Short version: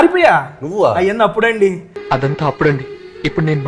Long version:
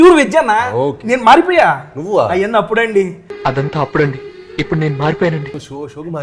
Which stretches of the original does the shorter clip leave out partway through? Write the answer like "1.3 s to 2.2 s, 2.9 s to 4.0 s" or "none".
none

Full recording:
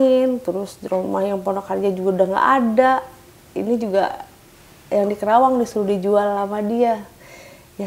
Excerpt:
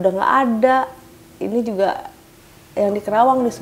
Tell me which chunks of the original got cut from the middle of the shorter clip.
none

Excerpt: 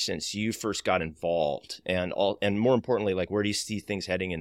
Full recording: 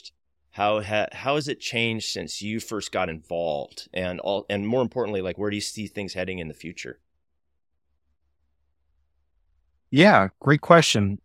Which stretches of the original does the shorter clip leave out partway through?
none

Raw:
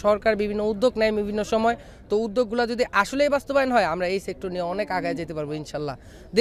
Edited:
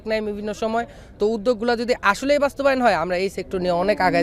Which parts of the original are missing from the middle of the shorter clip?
none

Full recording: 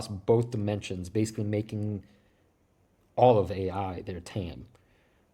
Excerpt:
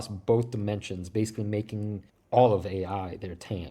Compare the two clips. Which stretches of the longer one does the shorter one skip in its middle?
2.1 s to 3.0 s

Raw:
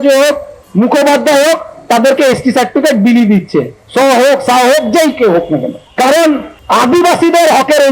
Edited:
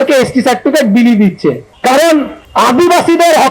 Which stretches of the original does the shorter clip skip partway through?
3.8 s to 5.8 s

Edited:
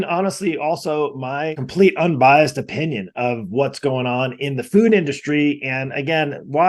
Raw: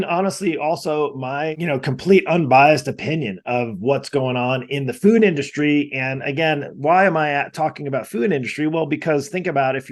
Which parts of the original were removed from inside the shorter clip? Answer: 1.6 s to 1.9 s

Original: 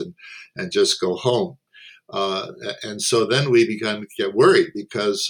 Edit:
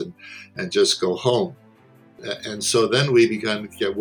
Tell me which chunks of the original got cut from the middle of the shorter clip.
2.1 s to 2.5 s

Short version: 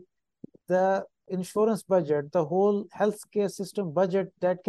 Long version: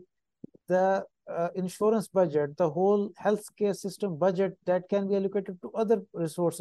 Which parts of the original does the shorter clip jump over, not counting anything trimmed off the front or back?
1.3 s to 1.5 s

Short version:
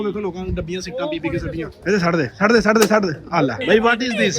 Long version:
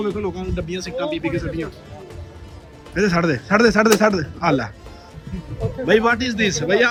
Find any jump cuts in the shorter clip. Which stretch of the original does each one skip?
1.7 s to 2.8 s, 4.7 s to 5.8 s

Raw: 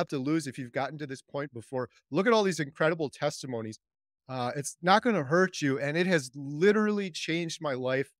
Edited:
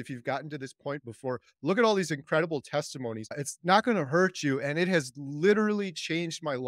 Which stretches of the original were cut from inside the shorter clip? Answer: 3.9 s to 4.6 s

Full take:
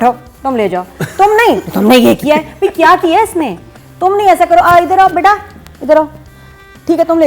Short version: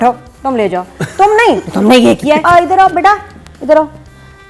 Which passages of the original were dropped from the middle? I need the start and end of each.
2.4 s to 4.6 s

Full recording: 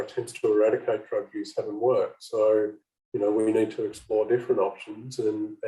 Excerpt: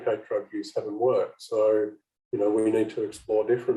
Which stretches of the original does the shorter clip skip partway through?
none

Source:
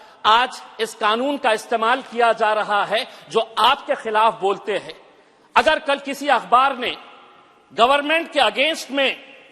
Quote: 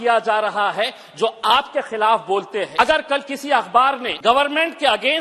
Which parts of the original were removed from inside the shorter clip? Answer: 4.8 s to 5.5 s, 6.9 s to 7.6 s

